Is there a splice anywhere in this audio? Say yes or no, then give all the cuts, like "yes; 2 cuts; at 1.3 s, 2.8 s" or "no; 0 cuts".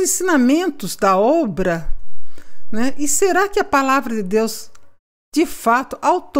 no; 0 cuts